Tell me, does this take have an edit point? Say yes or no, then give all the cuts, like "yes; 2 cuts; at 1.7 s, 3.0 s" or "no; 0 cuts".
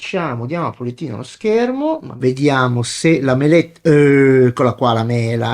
yes; 1 cut; at 2.1 s